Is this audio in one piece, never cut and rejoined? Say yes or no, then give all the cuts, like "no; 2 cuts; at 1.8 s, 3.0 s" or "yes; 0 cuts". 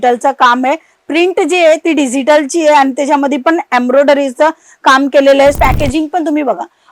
no; 1 cut; at 5.6 s